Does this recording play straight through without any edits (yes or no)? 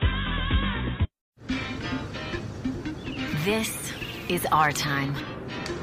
yes